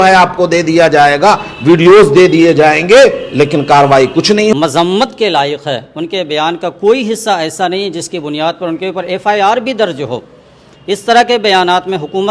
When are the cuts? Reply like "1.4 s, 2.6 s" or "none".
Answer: 4.5 s